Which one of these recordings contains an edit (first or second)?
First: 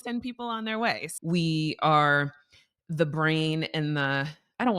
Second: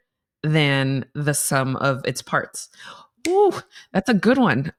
first